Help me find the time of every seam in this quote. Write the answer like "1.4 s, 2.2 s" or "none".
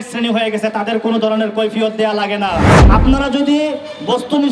2.8 s